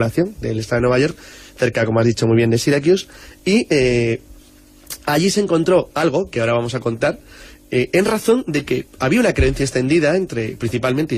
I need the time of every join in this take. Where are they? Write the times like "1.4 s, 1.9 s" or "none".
9.2 s